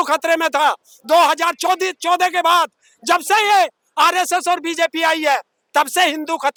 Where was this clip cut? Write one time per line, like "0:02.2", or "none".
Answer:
none